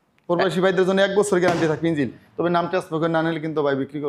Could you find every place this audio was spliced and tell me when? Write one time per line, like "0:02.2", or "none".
0:02.2